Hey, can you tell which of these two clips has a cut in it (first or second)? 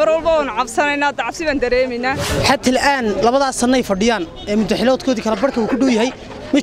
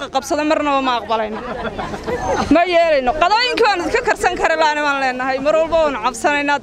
first